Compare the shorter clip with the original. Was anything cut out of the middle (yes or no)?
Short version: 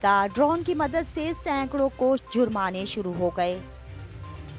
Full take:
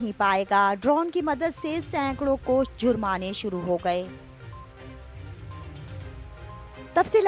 yes